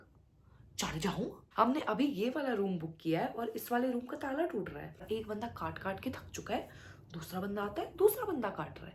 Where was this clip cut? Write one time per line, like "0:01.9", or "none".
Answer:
0:01.4
0:05.0